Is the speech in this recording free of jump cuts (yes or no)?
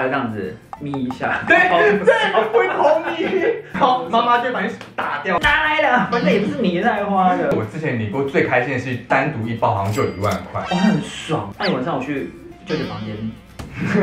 no